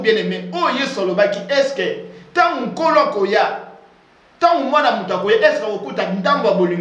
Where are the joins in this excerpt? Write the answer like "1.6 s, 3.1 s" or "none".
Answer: none